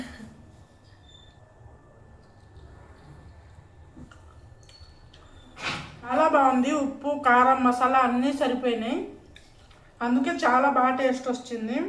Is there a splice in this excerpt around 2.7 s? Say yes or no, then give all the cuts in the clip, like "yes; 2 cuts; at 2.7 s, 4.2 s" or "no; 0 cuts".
no; 3 cuts; at 1.3 s, 4.1 s, 6.1 s